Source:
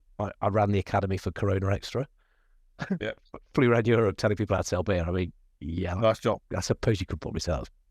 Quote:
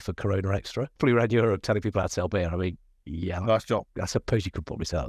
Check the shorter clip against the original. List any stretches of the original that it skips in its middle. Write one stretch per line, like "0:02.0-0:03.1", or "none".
0:02.1-0:03.5